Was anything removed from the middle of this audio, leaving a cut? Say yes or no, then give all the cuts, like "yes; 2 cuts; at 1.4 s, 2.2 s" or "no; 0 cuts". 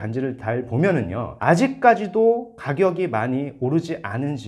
no; 0 cuts